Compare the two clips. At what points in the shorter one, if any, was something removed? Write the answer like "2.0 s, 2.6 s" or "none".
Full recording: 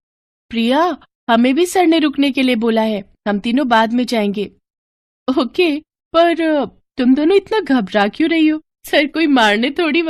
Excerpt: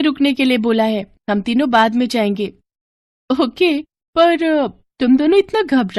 none